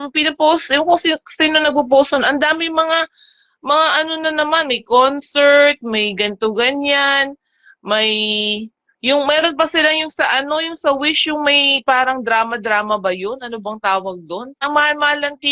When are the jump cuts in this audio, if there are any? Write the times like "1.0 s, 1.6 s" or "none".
14.6 s